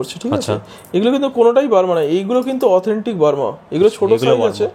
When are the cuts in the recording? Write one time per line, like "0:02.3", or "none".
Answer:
none